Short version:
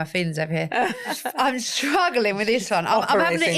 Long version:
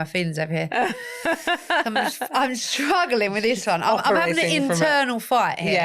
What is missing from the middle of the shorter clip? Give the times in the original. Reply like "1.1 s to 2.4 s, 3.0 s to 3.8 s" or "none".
1.1 s to 2.1 s